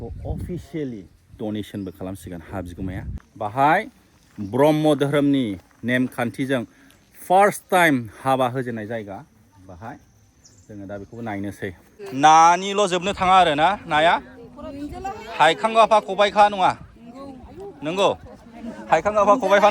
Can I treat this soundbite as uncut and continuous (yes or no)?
no